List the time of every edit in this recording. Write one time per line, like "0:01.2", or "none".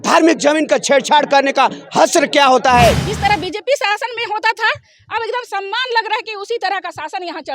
0:03.1